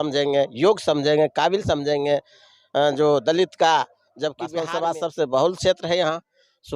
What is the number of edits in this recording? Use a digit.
1